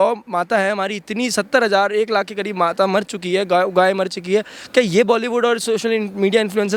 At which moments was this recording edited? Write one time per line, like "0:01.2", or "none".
none